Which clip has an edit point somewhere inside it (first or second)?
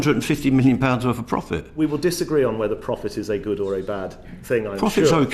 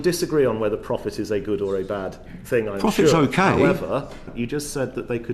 second